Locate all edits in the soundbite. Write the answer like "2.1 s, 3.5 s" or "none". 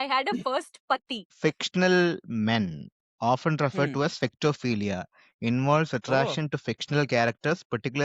1.4 s